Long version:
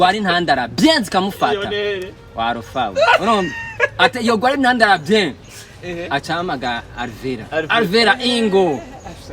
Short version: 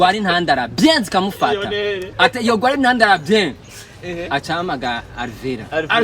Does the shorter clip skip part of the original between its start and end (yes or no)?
yes